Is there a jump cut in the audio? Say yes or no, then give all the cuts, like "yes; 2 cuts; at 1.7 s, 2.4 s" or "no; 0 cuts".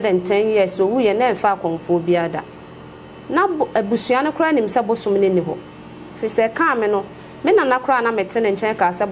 no; 0 cuts